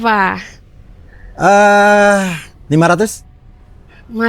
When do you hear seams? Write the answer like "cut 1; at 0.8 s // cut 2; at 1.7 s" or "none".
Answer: cut 1; at 2.5 s

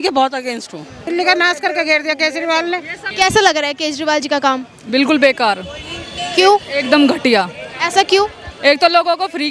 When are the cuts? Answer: cut 1; at 1.1 s // cut 2; at 3.0 s

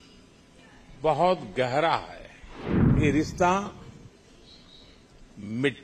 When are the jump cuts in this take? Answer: cut 1; at 2.9 s

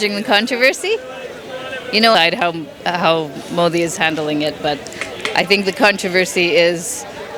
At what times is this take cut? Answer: none

